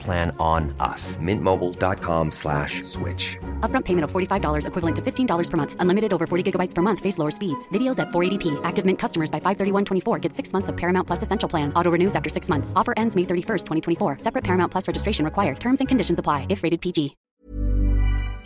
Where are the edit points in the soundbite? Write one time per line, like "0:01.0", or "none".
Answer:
0:17.2